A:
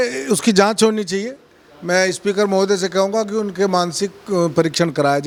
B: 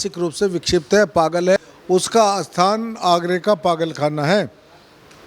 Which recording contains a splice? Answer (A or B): B